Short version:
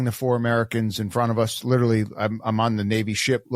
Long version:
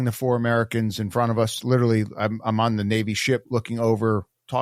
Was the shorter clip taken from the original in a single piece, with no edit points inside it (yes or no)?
yes